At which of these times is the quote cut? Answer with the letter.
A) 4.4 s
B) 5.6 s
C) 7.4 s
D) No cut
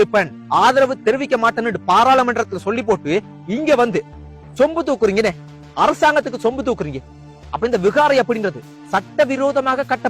C